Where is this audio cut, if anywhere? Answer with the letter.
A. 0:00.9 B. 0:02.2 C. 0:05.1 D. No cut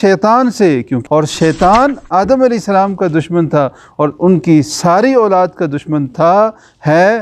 A